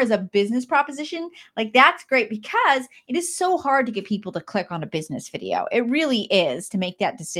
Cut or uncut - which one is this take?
uncut